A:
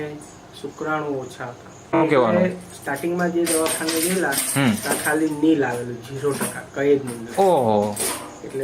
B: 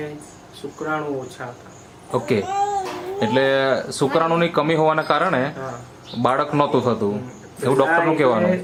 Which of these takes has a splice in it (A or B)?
A